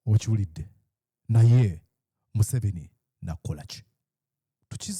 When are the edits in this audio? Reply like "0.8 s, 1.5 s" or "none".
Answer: none